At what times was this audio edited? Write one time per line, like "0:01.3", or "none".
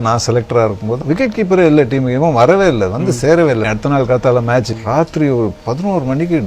0:00.9
0:03.6
0:04.7